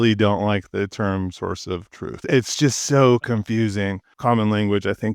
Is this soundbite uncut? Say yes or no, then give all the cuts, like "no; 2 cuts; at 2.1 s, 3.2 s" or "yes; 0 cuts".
no; 2 cuts; at 2.3 s, 4.1 s